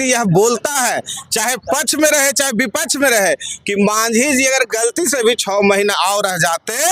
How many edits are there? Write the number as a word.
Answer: zero